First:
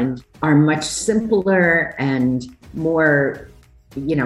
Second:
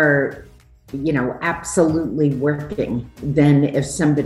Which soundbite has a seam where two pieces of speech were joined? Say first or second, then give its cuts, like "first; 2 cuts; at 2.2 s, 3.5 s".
second; 1 cut; at 3.2 s